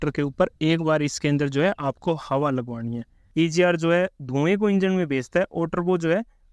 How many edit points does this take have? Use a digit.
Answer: 1